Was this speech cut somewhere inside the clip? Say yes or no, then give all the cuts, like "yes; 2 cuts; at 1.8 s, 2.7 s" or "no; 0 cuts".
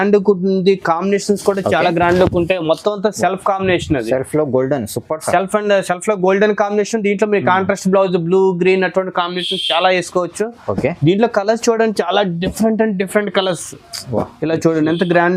no; 0 cuts